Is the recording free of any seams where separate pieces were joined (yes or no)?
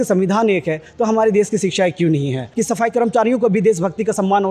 no